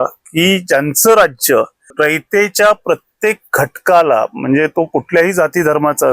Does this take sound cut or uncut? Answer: cut